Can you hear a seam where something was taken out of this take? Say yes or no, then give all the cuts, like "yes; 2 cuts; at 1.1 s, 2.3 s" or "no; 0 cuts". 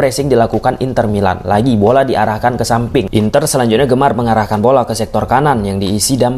yes; 1 cut; at 3.1 s